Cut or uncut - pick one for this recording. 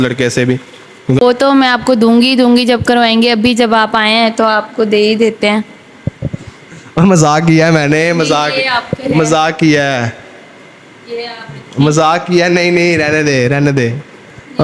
cut